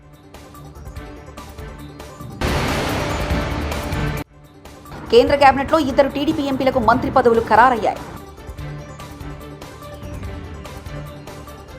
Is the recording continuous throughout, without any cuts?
no; 1 cut; at 2.4 s

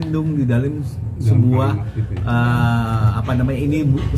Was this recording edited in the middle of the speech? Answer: no; 0 cuts

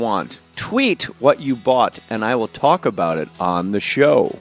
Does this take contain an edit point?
no; 0 cuts

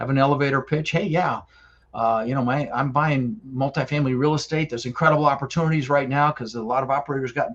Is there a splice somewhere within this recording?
no; 0 cuts

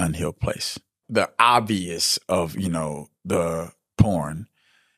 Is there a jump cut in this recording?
yes; 1 cut; at 1.0 s

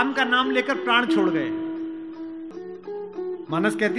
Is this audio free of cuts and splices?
no; 1 cut; at 2.5 s

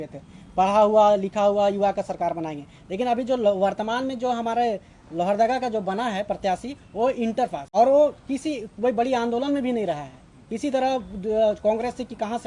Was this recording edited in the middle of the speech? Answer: yes; 1 cut; at 7.6 s

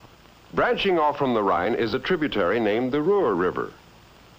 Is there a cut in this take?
yes; 1 cut; at 3.0 s

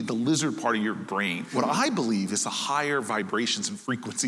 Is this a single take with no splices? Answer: no; 1 cut; at 1.5 s

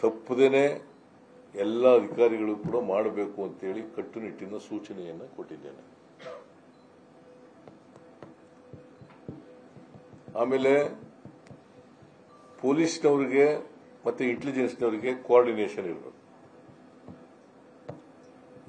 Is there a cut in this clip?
no; 0 cuts

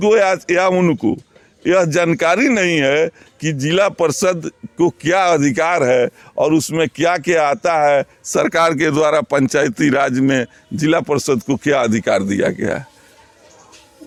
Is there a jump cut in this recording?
no; 0 cuts

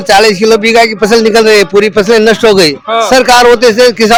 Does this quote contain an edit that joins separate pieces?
no; 0 cuts

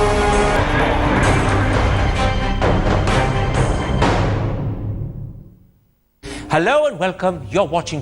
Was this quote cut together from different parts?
no; 0 cuts

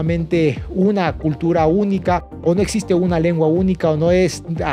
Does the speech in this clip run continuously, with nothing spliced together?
yes; 0 cuts

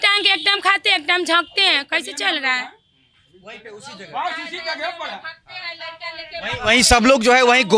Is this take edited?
no; 0 cuts

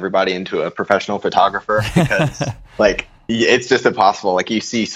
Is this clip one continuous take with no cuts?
yes; 0 cuts

